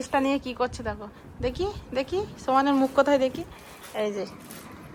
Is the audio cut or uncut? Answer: uncut